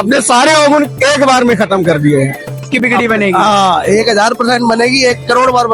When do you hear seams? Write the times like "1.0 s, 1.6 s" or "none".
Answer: 2.7 s